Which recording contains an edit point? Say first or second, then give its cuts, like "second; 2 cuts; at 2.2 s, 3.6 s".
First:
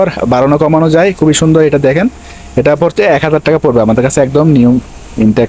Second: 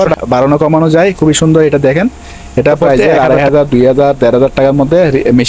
second; 1 cut; at 2.8 s